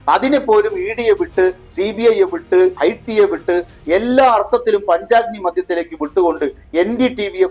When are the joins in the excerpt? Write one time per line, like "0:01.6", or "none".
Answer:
none